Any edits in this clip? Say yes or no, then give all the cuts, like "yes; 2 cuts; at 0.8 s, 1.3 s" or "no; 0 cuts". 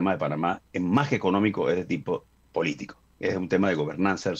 yes; 1 cut; at 2.9 s